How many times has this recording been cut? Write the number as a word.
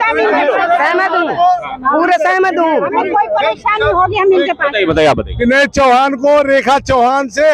zero